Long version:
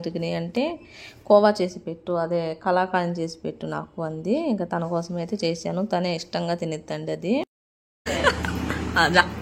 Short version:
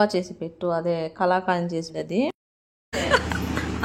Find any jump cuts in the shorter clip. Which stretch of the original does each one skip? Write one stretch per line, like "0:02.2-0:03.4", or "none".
0:03.4-0:07.0

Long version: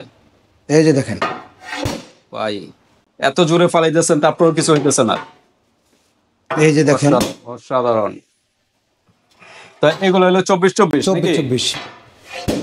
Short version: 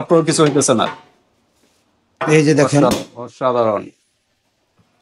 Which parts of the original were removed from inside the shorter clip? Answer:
none

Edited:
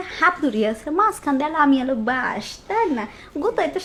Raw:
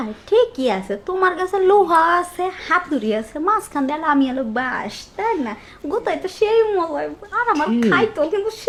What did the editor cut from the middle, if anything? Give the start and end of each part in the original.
none

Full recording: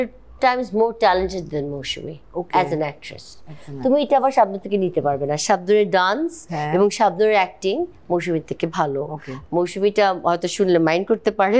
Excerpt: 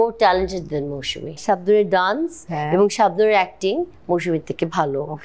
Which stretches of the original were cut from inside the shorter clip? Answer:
0:02.2-0:05.4

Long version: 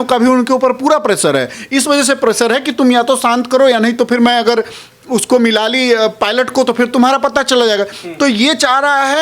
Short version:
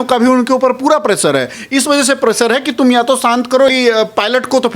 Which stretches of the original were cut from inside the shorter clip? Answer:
0:03.7-0:05.7

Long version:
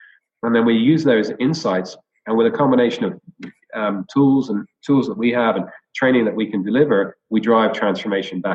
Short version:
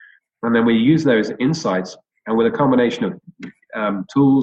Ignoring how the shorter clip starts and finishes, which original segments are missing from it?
none

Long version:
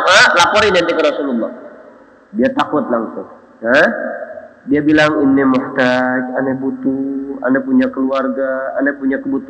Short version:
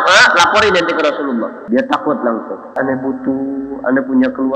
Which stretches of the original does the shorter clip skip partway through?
0:01.6-0:02.2
0:03.4-0:06.3

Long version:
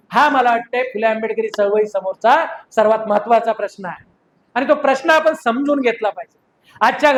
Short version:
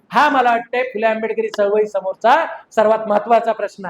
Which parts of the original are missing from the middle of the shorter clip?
none

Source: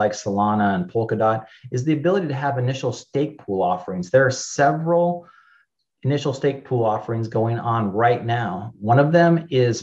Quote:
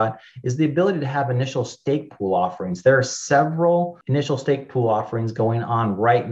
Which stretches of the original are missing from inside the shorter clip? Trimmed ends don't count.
0:05.3-0:05.9

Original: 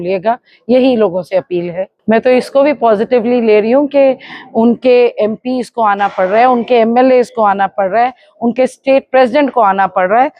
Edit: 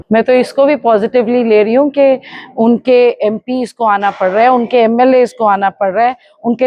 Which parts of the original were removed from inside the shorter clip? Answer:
none

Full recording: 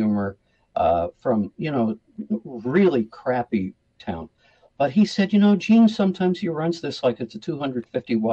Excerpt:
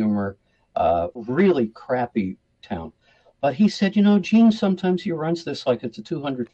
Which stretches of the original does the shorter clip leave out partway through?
0:01.1-0:02.5

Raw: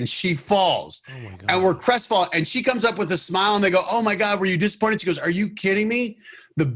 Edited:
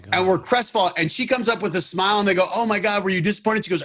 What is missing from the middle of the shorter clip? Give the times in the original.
none

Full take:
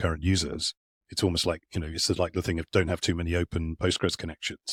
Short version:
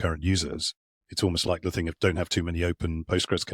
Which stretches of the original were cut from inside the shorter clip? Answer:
0:01.9-0:02.7

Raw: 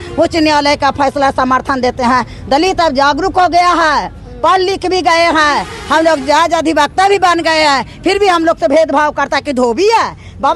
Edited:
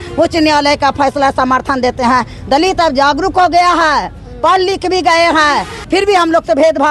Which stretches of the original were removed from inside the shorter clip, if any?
0:05.8-0:07.9

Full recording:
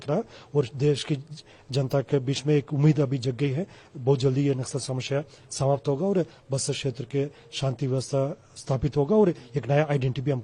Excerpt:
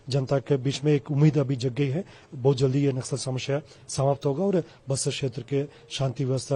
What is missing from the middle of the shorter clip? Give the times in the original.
none

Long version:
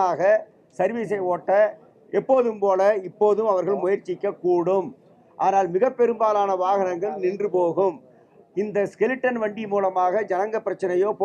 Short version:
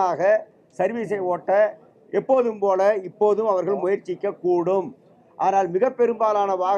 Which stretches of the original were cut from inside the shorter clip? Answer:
none

